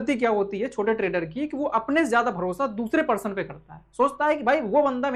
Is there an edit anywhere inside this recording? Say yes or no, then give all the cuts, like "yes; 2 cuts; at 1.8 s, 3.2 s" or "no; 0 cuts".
no; 0 cuts